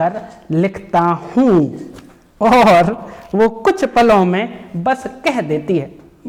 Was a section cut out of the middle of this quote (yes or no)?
no